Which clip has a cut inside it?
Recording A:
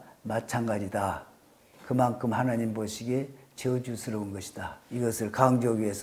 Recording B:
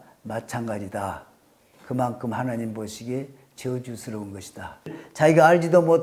B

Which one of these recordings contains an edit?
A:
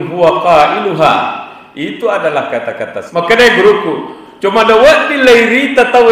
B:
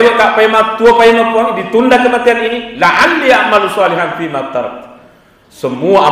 A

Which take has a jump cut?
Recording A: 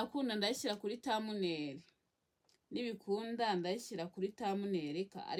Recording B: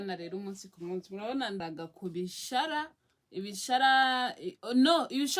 B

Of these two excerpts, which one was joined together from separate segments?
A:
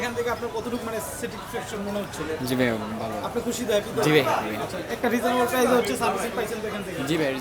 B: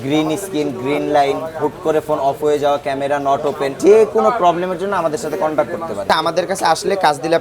B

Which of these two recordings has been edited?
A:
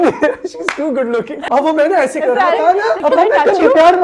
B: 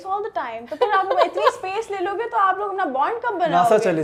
A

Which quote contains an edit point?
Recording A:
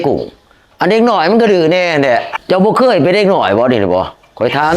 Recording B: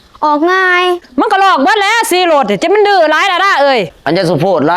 B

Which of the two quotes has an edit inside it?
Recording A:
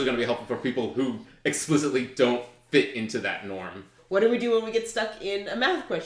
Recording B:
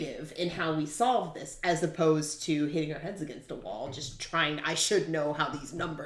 A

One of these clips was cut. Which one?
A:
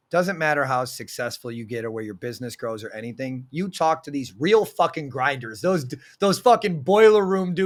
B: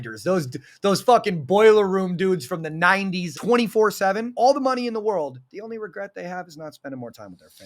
B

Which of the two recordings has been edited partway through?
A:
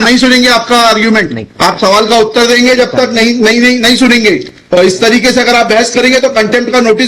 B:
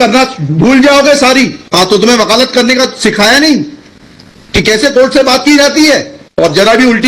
A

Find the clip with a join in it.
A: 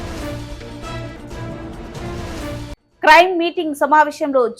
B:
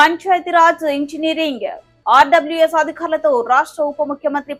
A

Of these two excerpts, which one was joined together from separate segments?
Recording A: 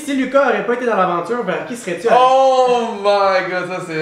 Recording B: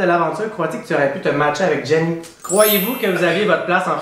B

